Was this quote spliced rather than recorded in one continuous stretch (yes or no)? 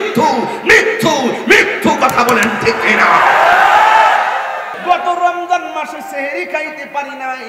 yes